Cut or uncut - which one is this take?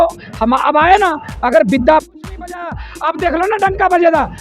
cut